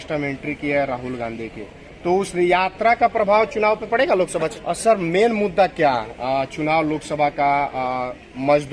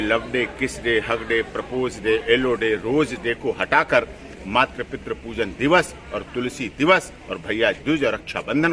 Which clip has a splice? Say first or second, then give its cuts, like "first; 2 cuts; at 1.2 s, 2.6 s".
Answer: first; 1 cut; at 4.5 s